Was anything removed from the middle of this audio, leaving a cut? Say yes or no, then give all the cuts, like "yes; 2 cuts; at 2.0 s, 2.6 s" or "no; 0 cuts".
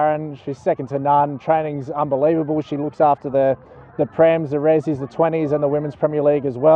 no; 0 cuts